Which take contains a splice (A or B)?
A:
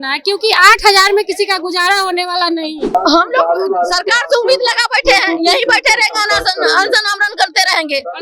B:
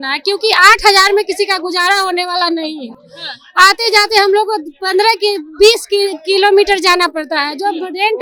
A